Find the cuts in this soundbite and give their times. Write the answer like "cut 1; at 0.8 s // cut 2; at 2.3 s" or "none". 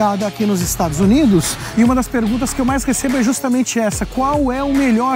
cut 1; at 1.6 s